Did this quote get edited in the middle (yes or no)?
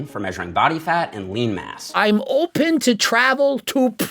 yes